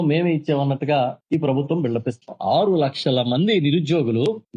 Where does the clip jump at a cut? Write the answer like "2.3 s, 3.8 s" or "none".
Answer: none